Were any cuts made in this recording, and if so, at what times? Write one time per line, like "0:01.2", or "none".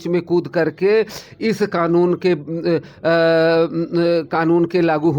none